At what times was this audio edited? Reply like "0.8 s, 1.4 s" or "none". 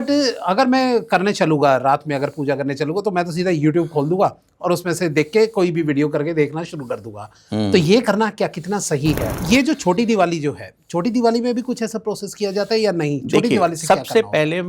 9.3 s